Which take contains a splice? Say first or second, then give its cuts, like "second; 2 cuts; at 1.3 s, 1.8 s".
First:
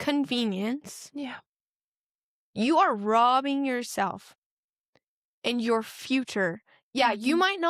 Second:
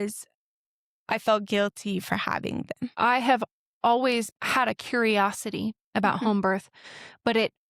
second; 2 cuts; at 2.9 s, 4.3 s